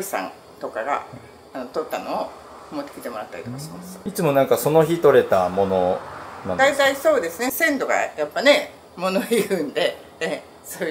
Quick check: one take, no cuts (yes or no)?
yes